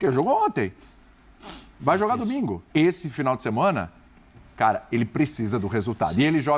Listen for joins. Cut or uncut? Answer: cut